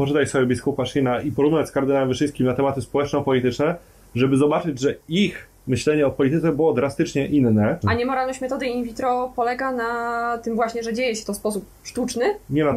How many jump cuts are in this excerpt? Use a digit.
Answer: 1